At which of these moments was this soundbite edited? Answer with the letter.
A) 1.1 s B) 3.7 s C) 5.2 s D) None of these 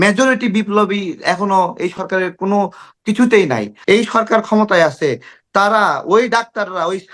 B